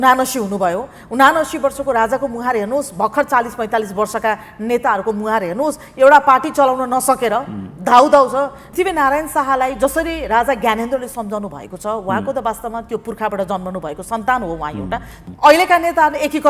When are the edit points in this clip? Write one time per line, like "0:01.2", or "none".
0:08.6
0:15.1